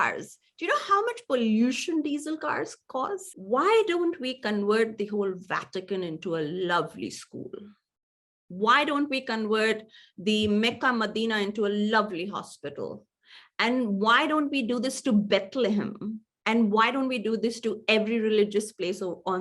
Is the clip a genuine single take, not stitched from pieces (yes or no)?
no